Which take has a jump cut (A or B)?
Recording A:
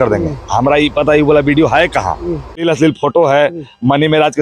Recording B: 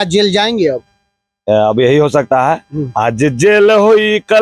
A